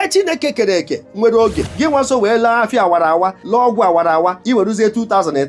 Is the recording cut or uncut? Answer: cut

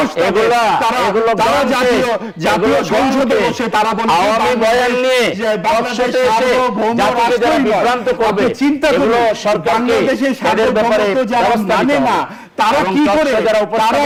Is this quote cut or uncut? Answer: uncut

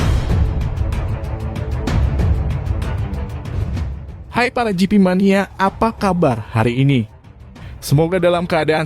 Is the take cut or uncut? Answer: cut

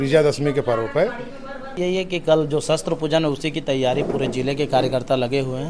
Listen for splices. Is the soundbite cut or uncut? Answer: cut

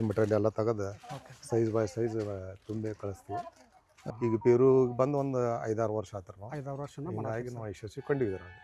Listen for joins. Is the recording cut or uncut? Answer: cut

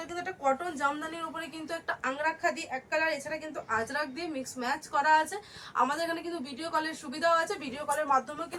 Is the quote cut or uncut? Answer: uncut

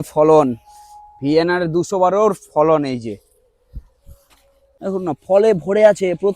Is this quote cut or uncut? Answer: cut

